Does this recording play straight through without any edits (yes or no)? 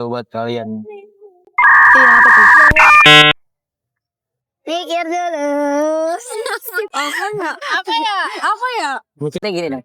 yes